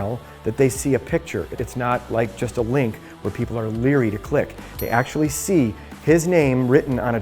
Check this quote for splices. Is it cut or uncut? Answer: cut